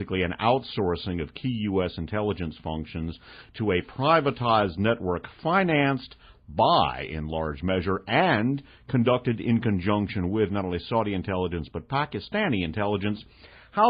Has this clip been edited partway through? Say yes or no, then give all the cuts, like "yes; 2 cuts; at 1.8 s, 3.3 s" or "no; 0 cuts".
no; 0 cuts